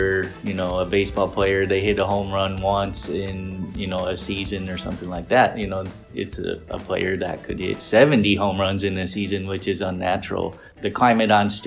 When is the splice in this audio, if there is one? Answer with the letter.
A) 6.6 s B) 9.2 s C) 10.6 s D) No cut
C